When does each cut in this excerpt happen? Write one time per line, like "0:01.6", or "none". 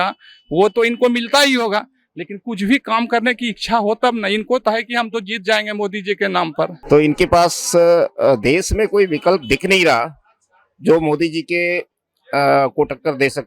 0:06.8